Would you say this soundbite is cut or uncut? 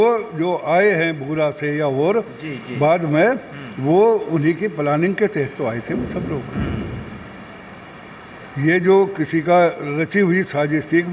uncut